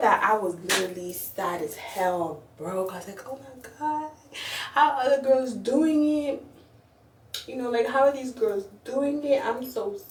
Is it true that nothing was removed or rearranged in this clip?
yes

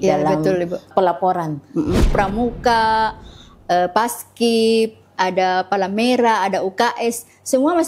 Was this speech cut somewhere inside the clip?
yes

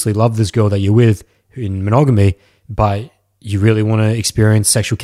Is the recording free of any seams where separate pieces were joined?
yes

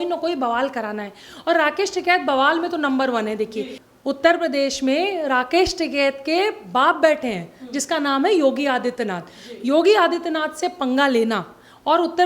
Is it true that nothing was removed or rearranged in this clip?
no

